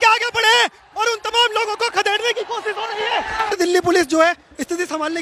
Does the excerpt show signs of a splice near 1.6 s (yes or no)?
no